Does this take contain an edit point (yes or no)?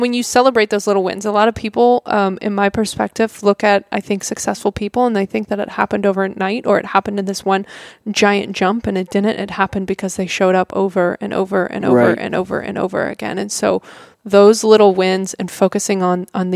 no